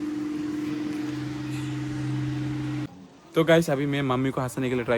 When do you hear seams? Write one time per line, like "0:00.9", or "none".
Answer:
0:02.8